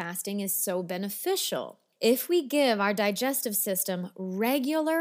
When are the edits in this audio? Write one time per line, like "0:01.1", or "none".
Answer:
0:01.8